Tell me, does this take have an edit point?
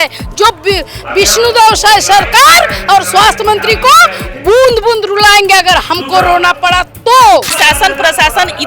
yes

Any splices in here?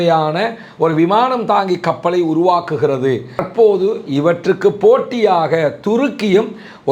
yes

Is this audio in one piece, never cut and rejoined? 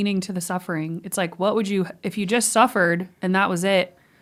yes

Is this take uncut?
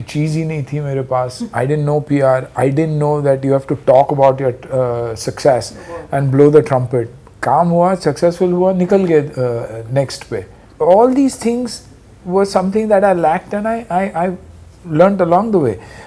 yes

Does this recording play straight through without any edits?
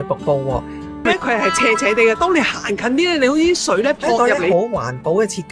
no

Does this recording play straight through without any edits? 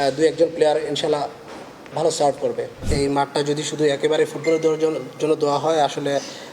no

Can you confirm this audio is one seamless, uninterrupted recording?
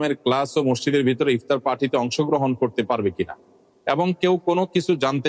yes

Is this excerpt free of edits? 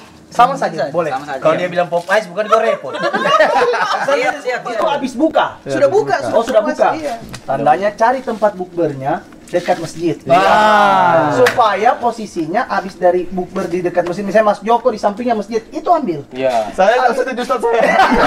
no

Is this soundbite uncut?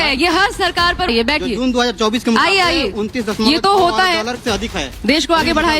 no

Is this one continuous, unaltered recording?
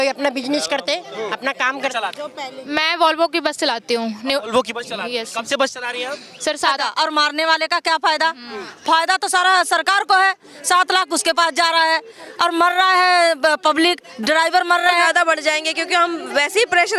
no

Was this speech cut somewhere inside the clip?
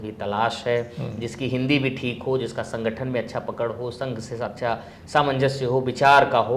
no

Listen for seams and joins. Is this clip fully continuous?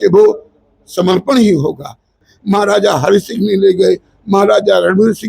no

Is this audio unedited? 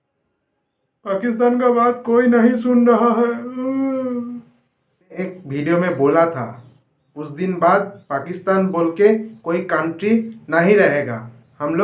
no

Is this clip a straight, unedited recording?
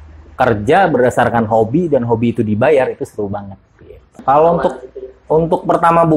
yes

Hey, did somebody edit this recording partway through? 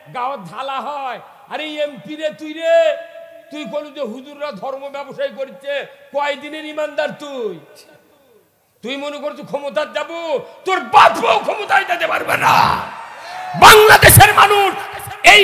no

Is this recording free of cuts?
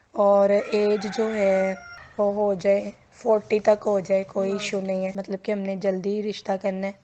no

